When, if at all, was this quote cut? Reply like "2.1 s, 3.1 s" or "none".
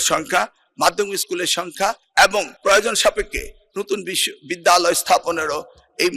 2.1 s